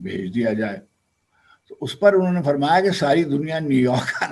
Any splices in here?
no; 0 cuts

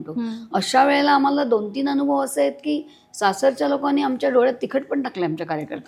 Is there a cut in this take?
no; 0 cuts

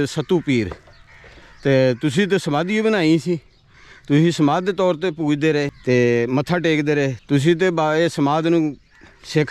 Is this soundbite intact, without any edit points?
no; 1 cut; at 5.8 s

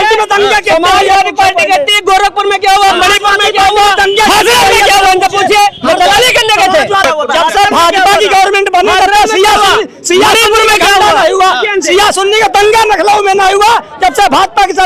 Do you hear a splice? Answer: yes; 1 cut; at 7.1 s

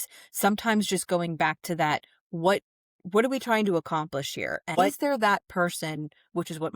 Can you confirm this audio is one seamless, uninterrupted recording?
no; 1 cut; at 4.7 s

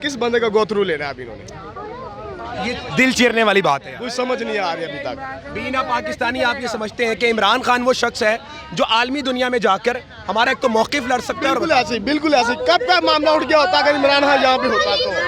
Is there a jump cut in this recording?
no; 0 cuts

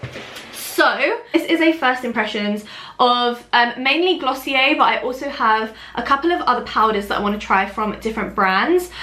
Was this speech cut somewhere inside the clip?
yes; 1 cut; at 1.3 s

